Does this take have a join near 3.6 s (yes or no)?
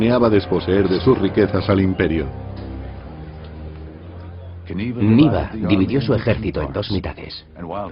yes